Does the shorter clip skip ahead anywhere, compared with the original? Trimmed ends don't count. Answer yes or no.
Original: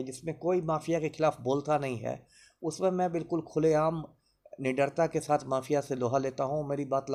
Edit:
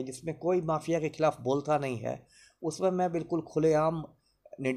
no